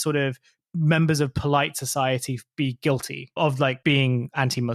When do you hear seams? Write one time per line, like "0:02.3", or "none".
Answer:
0:03.8